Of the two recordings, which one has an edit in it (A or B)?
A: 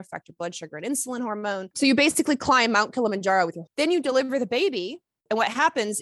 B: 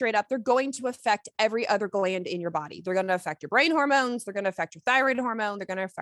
A